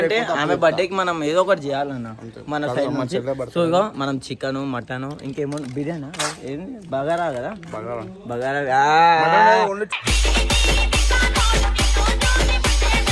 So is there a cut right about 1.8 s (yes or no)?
no